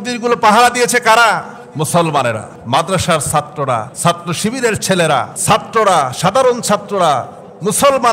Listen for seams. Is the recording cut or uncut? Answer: cut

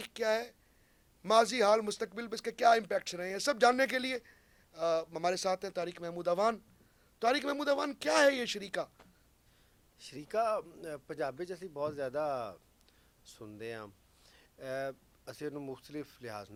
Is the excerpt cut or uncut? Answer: uncut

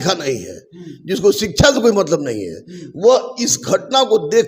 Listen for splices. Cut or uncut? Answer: uncut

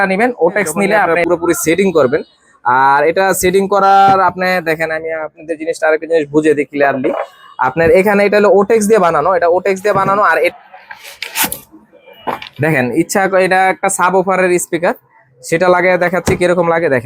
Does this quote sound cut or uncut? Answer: cut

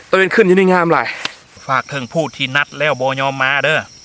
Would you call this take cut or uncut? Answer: cut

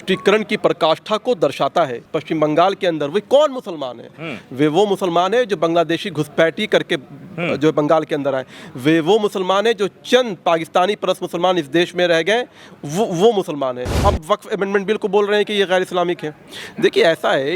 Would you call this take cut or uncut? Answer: cut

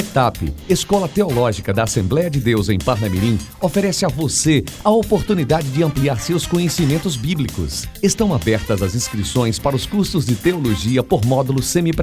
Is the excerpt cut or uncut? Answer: uncut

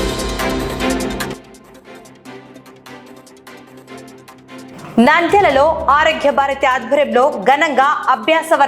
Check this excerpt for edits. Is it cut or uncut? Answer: cut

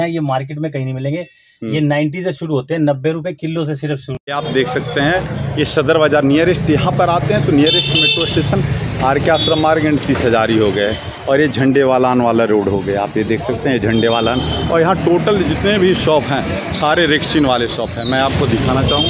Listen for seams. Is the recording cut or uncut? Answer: cut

